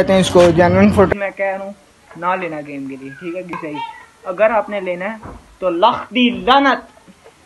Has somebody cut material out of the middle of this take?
yes; 1 cut; at 1.1 s

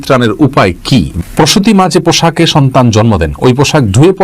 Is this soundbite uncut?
no; 1 cut; at 1.2 s

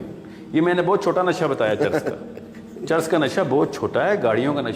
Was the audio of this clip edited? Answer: no; 0 cuts

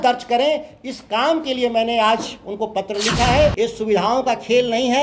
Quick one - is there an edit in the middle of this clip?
yes; 1 cut; at 3.5 s

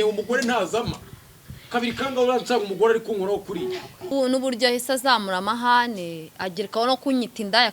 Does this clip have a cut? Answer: yes; 1 cut; at 4.1 s

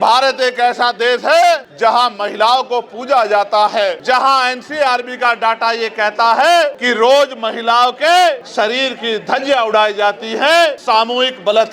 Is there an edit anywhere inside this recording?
yes; 4 cuts; at 4.0 s, 6.8 s, 8.4 s, 10.8 s

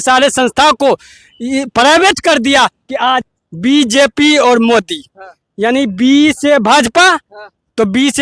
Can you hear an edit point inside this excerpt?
yes; 1 cut; at 3.4 s

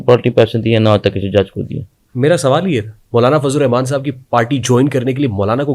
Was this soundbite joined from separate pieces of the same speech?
no; 0 cuts

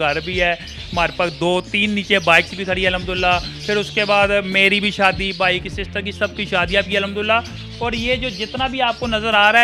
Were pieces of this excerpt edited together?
no; 0 cuts

